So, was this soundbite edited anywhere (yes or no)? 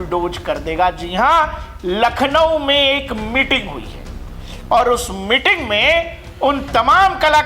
no